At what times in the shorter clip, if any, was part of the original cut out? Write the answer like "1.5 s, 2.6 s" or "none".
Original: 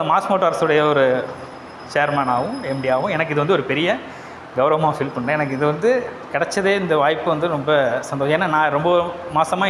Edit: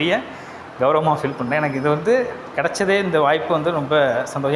none